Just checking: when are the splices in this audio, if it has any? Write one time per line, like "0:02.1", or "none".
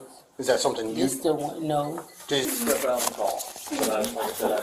0:02.5